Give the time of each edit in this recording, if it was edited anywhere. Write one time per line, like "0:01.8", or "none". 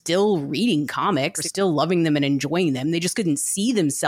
0:01.4